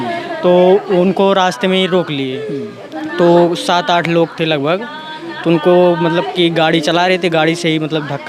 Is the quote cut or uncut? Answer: uncut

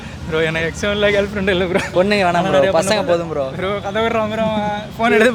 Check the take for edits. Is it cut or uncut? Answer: cut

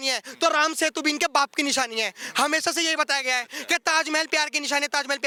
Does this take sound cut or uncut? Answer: uncut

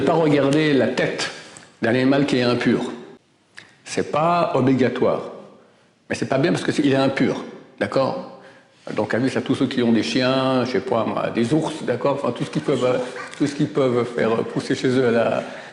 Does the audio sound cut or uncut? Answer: uncut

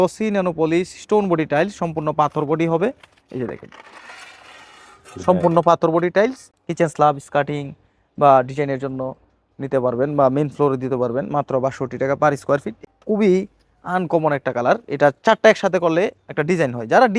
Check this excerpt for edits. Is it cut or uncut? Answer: cut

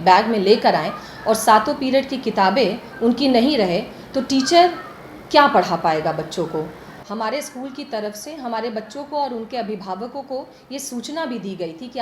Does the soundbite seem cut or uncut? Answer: uncut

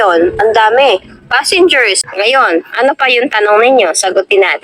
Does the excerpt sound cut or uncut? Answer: cut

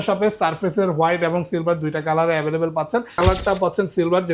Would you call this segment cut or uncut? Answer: cut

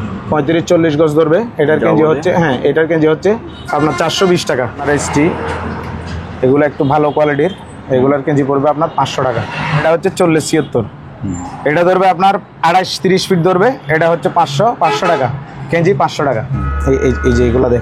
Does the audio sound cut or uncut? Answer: cut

